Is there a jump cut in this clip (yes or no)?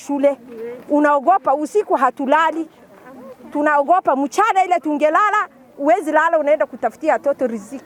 no